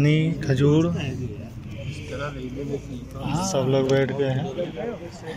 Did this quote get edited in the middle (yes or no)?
no